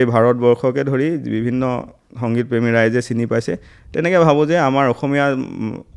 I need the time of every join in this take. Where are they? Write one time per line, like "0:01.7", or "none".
none

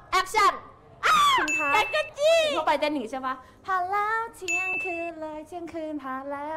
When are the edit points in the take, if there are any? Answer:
0:02.6

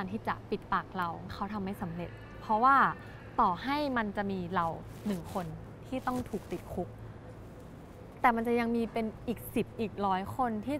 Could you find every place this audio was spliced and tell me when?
0:01.3

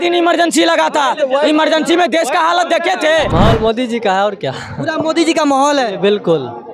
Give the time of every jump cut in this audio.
0:03.3

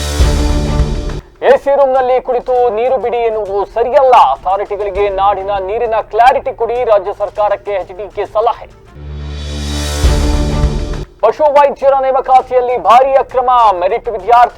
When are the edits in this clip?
0:00.9

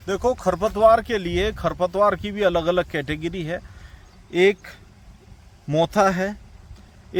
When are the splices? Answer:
none

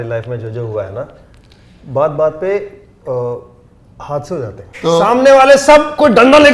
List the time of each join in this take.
0:04.7

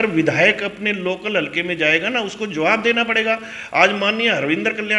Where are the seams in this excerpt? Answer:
none

